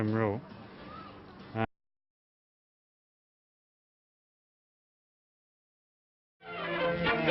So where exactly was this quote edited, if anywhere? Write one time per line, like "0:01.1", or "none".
none